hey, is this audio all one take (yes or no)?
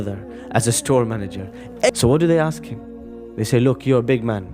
no